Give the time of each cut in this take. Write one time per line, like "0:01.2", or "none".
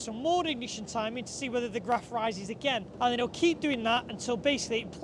0:02.9